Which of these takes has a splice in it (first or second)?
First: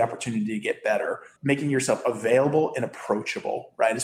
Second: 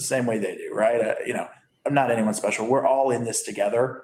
first